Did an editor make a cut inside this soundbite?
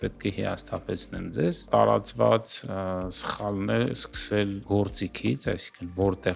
yes; 2 cuts; at 1.7 s, 4.6 s

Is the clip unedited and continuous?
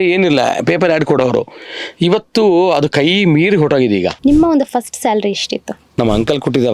no; 2 cuts; at 4.1 s, 5.8 s

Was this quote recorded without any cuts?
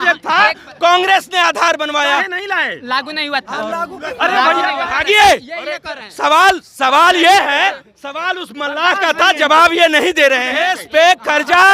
no; 2 cuts; at 4.9 s, 10.5 s

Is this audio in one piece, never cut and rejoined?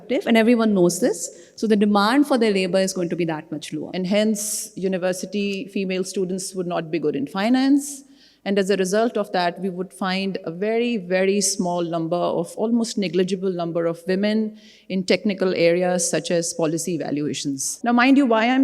no; 2 cuts; at 3.8 s, 17.7 s

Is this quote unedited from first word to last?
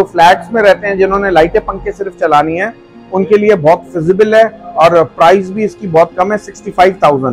yes; 0 cuts

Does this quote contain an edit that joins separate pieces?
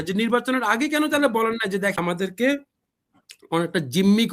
yes; 1 cut; at 2.0 s

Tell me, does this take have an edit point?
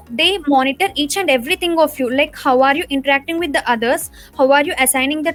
no; 0 cuts

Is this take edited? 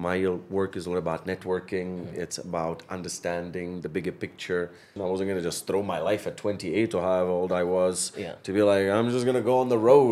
yes; 1 cut; at 4.9 s

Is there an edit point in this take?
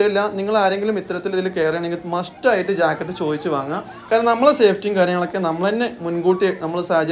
no; 0 cuts

